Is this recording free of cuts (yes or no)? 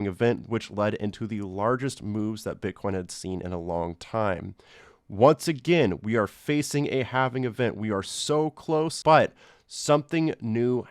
no